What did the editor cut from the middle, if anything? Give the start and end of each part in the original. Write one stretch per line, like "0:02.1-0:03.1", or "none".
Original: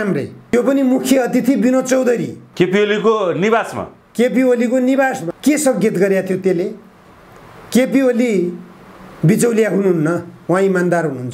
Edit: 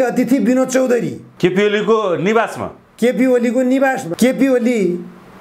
0:05.2-0:07.6

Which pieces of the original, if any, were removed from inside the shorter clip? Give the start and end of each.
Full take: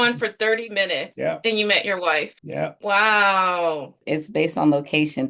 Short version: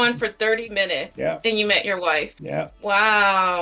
none

